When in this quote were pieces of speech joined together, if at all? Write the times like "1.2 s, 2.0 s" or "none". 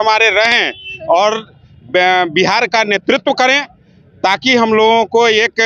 none